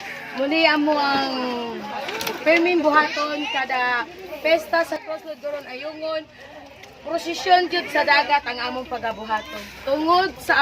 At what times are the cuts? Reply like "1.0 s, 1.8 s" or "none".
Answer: 5.1 s